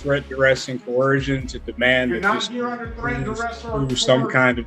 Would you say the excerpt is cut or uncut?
uncut